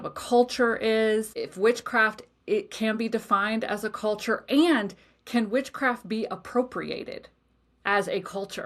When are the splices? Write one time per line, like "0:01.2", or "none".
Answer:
0:01.3